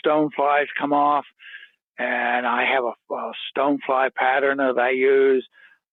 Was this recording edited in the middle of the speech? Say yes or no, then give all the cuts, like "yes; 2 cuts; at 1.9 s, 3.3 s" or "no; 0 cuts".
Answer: no; 0 cuts